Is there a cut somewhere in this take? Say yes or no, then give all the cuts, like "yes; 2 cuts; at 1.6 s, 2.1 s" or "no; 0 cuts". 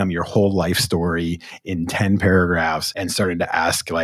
yes; 1 cut; at 2.9 s